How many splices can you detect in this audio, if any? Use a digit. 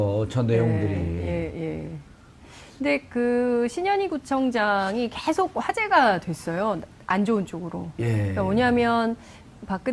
0